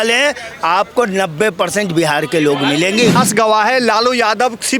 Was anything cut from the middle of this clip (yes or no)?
yes